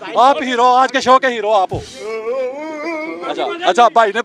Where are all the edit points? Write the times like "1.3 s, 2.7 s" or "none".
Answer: 1.9 s, 3.2 s